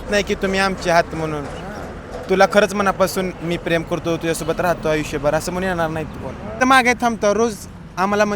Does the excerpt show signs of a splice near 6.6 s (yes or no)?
yes